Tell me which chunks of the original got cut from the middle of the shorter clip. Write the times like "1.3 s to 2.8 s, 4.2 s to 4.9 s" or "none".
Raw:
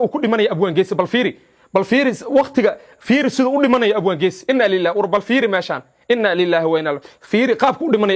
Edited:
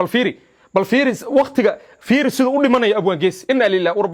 none